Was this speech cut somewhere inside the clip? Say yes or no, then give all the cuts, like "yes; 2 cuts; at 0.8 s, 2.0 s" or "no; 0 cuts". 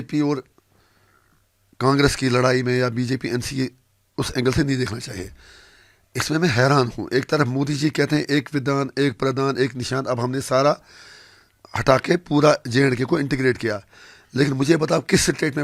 no; 0 cuts